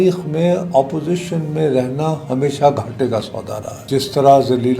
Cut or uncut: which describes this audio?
cut